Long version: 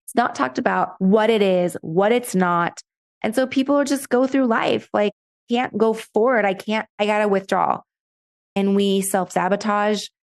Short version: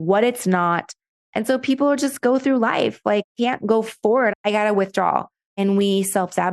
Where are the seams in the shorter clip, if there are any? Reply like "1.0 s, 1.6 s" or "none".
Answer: 3.3 s, 4.3 s, 5.4 s